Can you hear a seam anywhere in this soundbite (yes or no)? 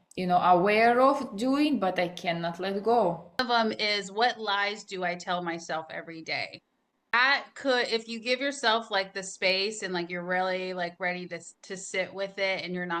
yes